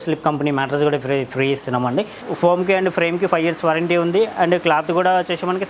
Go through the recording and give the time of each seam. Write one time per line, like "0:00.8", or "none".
0:02.2

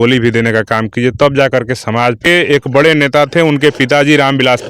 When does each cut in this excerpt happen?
0:02.2

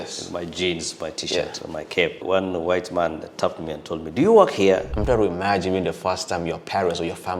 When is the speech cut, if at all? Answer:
0:02.2
0:04.9

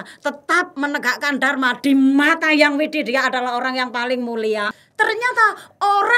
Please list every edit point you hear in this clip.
0:04.7

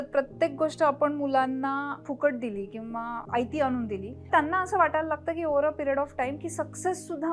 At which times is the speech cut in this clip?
0:02.0
0:03.2
0:04.3

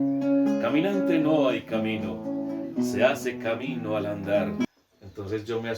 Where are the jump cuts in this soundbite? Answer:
0:04.7

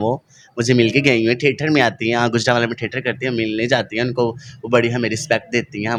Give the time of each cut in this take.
none

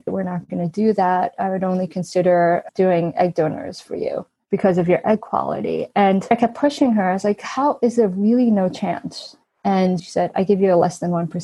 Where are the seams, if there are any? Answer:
0:04.3
0:06.3
0:10.1

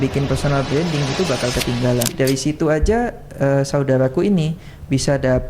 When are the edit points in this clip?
0:02.1

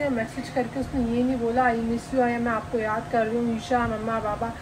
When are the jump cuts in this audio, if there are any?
none

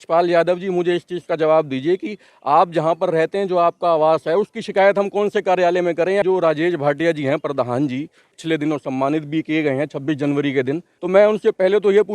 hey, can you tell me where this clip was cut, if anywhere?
0:06.2
0:08.3
0:10.9

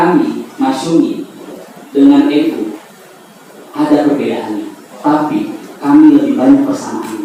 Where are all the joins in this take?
none

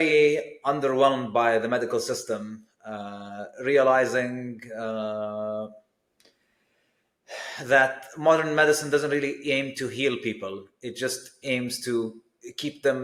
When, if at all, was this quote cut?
none

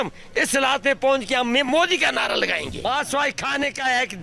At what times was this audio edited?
0:02.8

